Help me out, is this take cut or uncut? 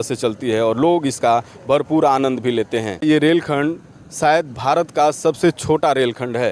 cut